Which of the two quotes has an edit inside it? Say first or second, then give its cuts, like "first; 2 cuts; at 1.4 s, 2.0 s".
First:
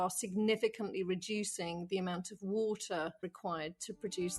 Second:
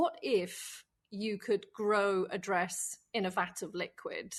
first; 1 cut; at 3.2 s